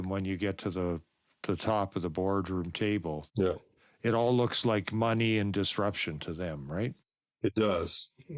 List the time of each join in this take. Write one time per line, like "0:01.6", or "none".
0:07.2